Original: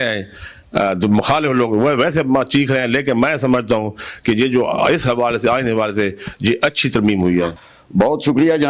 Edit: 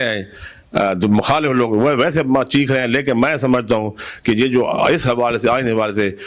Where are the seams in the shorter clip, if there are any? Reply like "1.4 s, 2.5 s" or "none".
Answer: none